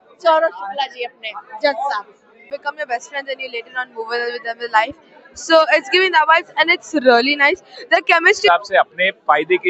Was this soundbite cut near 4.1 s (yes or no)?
no